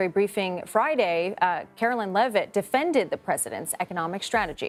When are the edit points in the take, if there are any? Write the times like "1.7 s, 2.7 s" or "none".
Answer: none